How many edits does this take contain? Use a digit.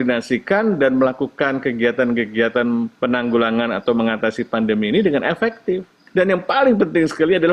2